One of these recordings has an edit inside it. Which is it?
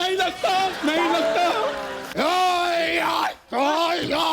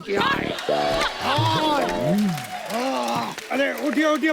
first; 1 cut; at 2.0 s

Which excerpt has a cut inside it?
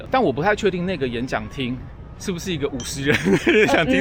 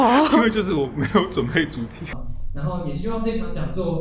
second; 1 cut; at 2.0 s

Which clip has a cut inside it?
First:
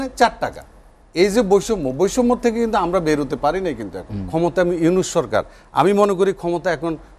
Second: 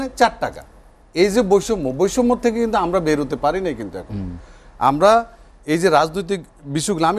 first; 1 cut; at 4.2 s

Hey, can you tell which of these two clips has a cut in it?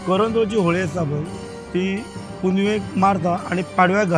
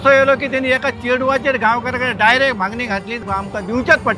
second; 1 cut; at 3.1 s

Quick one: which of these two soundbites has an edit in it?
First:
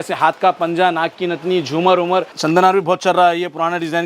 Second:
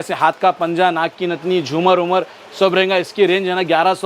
first; 1 cut; at 2.4 s

